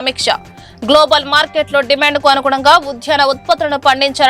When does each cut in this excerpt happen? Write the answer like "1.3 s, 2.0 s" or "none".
none